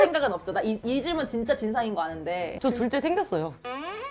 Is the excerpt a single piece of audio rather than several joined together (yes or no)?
no